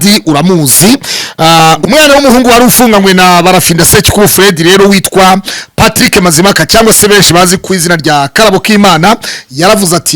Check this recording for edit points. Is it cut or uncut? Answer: cut